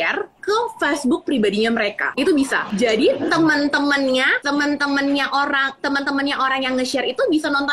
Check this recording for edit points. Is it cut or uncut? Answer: cut